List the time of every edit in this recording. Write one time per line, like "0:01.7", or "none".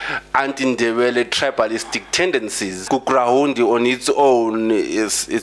0:02.8